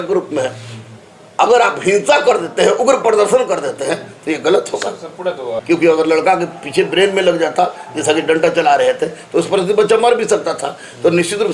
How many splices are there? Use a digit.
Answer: 1